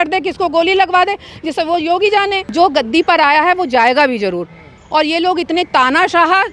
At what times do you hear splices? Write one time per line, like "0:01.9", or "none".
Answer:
0:02.4